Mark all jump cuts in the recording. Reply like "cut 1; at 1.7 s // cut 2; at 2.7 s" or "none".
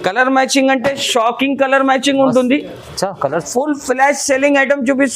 cut 1; at 3.4 s